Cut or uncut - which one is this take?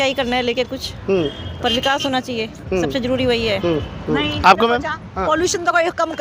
uncut